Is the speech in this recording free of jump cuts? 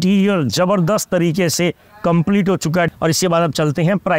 no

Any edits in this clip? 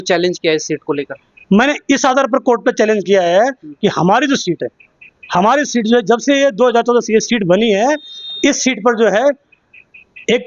no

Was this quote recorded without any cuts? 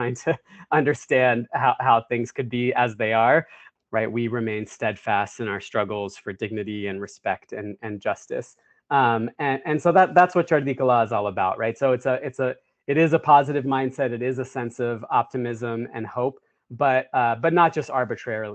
no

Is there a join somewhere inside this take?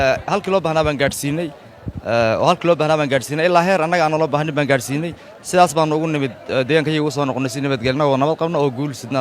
no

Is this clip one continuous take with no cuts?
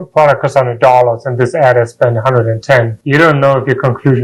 yes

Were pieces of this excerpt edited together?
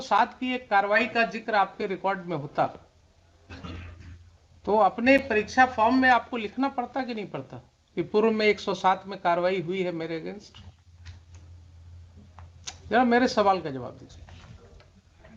no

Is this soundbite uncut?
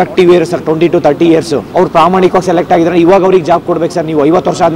no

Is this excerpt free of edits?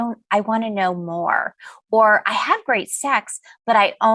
yes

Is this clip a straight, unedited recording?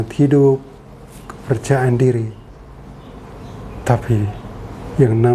yes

